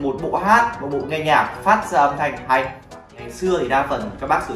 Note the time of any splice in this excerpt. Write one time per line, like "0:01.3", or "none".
0:03.1